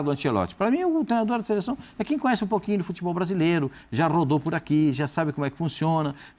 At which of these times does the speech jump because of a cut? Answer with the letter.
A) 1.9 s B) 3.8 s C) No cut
C